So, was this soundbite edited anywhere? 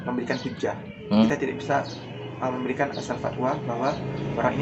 yes; 1 cut; at 1.3 s

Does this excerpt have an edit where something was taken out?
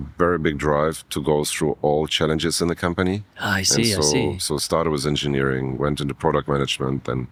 no; 0 cuts

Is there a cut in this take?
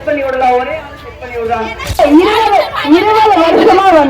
yes; 1 cut; at 1.8 s

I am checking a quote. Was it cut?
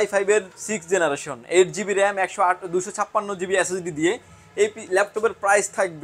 no; 0 cuts

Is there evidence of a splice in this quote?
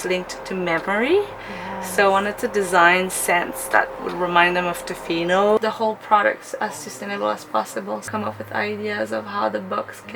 yes; 3 cuts; at 4.0 s, 5.6 s, 8.1 s

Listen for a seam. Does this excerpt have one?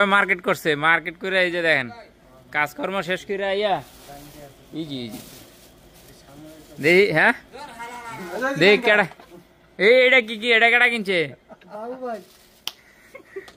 no; 0 cuts

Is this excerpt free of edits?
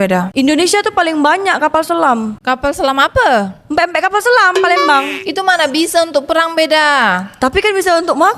yes; 0 cuts

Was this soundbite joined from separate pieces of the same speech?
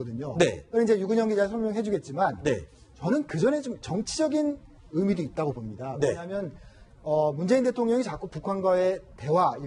no; 0 cuts

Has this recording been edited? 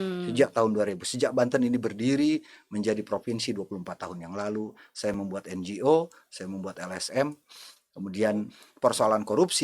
yes; 1 cut; at 8.6 s

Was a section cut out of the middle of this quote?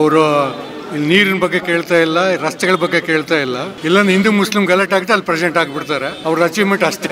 yes; 2 cuts; at 3.7 s, 6.1 s

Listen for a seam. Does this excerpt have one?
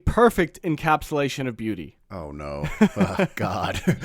no; 0 cuts

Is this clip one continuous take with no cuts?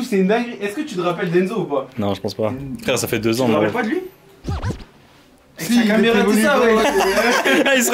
yes; 0 cuts

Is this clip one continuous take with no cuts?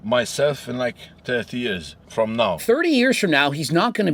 yes; 0 cuts

